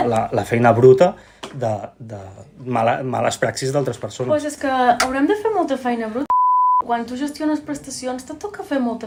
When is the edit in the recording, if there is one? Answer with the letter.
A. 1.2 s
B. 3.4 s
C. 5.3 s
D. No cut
D